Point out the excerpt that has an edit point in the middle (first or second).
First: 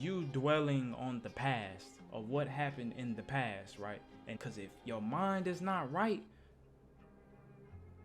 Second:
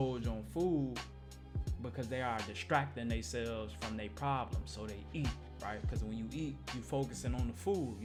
first